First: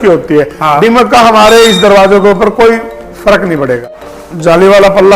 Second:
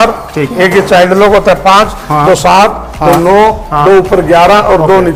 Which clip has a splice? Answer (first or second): first